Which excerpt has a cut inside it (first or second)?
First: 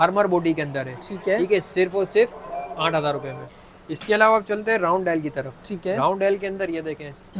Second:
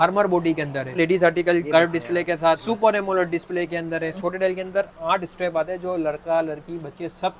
second